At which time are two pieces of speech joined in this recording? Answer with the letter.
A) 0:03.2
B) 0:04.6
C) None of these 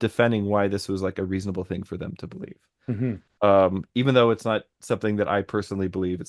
C